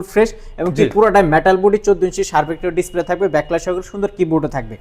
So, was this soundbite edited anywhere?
no; 0 cuts

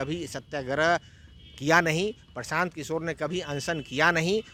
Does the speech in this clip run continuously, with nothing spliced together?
yes; 0 cuts

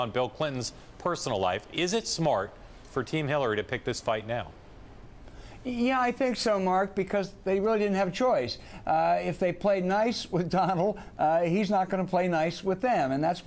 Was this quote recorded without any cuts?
yes; 0 cuts

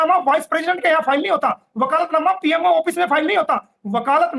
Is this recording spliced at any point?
no; 0 cuts

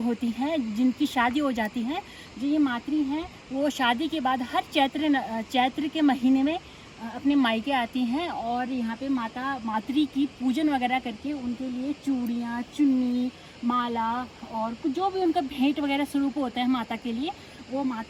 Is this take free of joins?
yes; 0 cuts

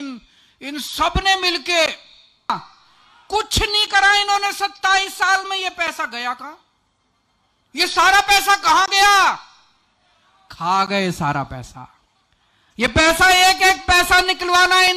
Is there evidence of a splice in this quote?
yes; 1 cut; at 2.5 s

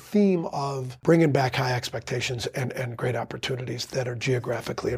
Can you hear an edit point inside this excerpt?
yes; 1 cut; at 0.9 s

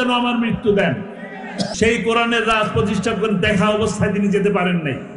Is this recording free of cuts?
no; 1 cut; at 1.7 s

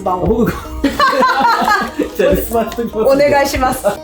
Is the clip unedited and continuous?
yes; 0 cuts

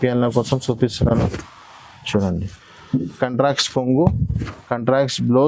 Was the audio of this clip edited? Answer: no; 0 cuts

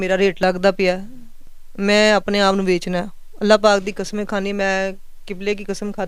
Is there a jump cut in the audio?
no; 0 cuts

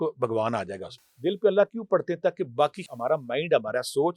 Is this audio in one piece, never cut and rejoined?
no; 2 cuts; at 0.8 s, 2.8 s

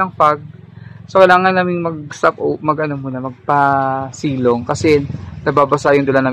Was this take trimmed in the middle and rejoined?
no; 0 cuts

